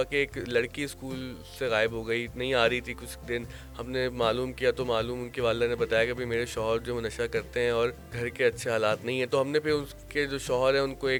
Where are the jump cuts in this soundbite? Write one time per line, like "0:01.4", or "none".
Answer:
none

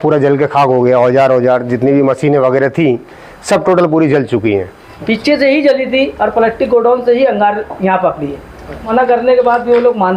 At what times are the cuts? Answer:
0:04.9
0:08.9

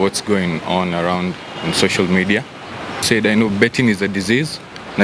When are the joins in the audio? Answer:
0:03.0

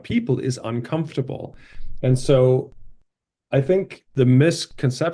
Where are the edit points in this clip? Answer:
none

